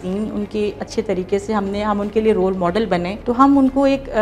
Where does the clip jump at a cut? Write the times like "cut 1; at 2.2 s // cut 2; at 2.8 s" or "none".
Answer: cut 1; at 3.2 s